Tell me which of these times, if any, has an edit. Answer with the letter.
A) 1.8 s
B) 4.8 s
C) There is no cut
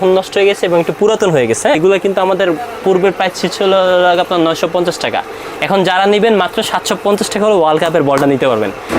A